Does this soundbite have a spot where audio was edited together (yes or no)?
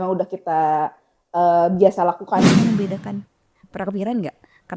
yes